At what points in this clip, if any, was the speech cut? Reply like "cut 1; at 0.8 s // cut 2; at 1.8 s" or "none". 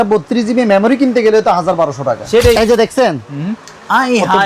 cut 1; at 2.6 s